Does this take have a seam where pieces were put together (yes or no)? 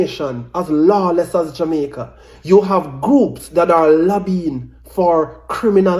no